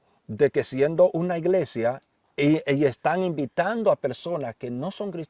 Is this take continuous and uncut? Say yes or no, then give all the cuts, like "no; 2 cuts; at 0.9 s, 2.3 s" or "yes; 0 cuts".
yes; 0 cuts